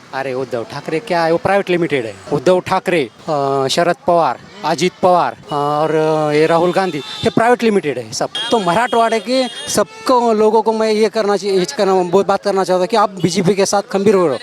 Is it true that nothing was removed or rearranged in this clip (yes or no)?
no